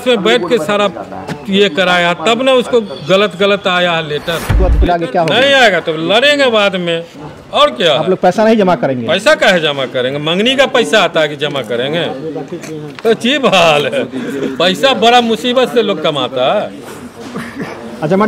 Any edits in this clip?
yes; 1 cut; at 4.6 s

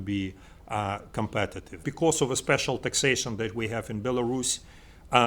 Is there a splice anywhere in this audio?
yes; 1 cut; at 1.8 s

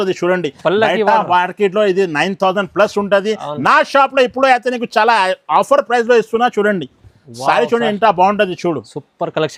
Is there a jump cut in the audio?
no; 0 cuts

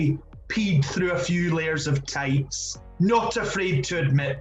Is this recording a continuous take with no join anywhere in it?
yes; 0 cuts

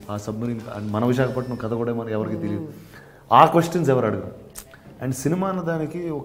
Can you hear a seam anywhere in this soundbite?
no; 0 cuts

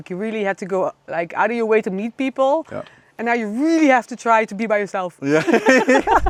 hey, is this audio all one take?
yes; 0 cuts

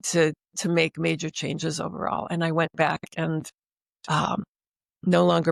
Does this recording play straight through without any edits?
yes; 0 cuts

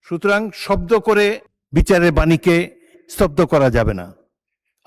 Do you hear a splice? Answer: yes; 1 cut; at 1.5 s

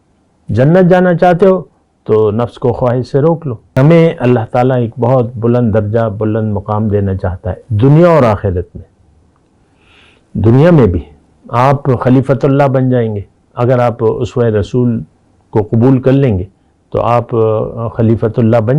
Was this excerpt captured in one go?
no; 1 cut; at 3.7 s

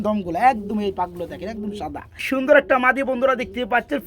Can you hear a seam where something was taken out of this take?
yes; 1 cut; at 2.3 s

